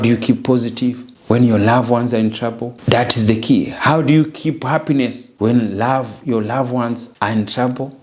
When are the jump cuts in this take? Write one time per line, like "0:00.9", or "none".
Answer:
0:01.1
0:02.7
0:05.2
0:07.1